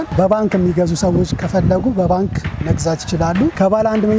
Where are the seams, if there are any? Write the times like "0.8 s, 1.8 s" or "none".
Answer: none